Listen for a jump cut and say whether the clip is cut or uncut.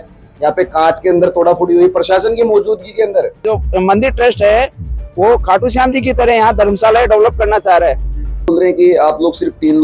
cut